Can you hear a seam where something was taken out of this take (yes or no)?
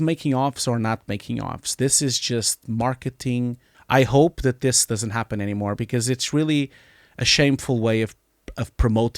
yes